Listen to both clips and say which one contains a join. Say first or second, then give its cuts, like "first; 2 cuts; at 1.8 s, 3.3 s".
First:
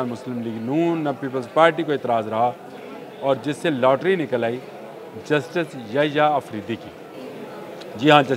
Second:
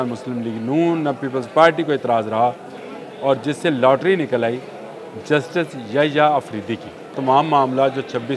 second; 1 cut; at 7.1 s